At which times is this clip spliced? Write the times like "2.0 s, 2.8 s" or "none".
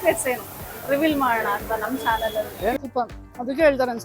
2.8 s